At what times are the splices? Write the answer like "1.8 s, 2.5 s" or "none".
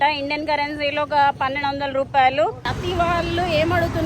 2.7 s